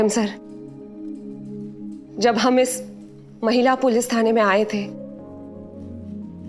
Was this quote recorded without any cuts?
yes; 0 cuts

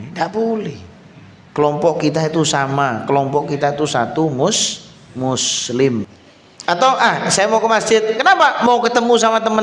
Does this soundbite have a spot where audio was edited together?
yes; 1 cut; at 6.1 s

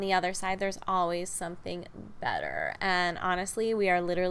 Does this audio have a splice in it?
no; 0 cuts

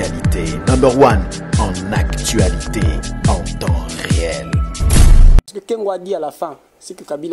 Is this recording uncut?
no; 1 cut; at 5.5 s

